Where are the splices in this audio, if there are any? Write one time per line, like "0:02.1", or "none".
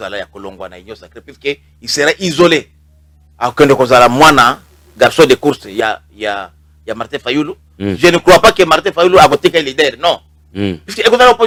none